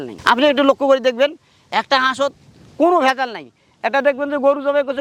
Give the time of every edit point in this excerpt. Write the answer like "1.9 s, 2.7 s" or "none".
none